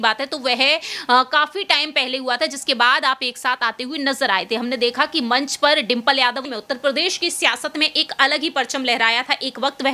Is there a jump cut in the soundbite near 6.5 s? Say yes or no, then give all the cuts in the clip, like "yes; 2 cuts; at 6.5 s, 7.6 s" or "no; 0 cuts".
yes; 1 cut; at 6.5 s